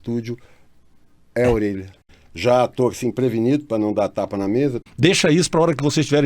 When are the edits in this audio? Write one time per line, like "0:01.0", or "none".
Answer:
0:01.9
0:04.8